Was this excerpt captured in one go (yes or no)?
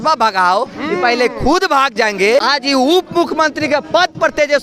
no